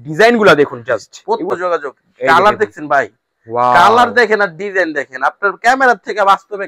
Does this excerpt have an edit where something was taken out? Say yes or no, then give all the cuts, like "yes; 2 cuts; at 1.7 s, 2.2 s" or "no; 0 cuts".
yes; 1 cut; at 1.5 s